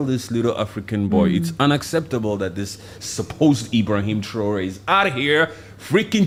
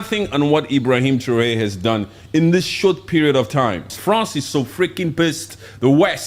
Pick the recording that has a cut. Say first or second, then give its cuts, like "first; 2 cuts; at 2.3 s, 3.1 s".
second; 1 cut; at 3.9 s